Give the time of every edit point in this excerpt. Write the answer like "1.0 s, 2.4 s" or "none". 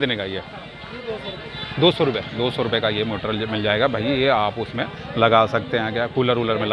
none